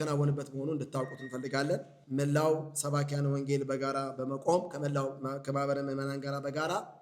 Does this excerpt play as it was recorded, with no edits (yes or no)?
no